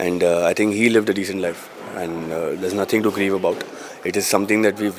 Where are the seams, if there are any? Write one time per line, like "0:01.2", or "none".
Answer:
none